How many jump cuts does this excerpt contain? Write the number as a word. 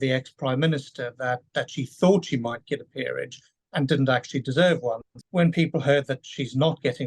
one